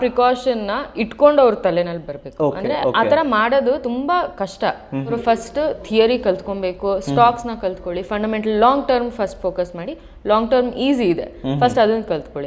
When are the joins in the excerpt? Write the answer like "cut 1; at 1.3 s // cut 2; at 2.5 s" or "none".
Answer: cut 1; at 5.2 s